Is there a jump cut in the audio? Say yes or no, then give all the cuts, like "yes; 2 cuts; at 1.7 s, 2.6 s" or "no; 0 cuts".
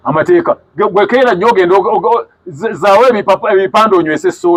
no; 0 cuts